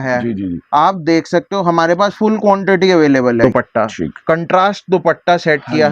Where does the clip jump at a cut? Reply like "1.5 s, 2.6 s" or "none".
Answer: 3.4 s